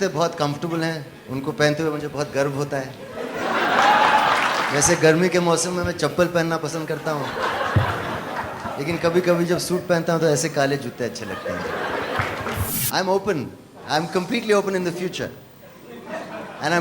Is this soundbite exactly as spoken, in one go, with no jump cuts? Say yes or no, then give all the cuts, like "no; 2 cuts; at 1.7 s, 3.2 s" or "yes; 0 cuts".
no; 2 cuts; at 4.7 s, 12.7 s